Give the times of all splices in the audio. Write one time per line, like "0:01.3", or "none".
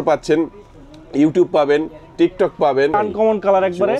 0:02.9